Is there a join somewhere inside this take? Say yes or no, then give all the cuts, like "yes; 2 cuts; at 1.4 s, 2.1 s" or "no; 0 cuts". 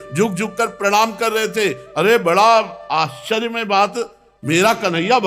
no; 0 cuts